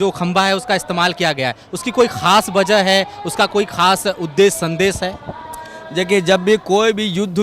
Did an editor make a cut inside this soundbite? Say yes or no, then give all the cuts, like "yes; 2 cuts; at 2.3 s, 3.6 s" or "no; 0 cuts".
no; 0 cuts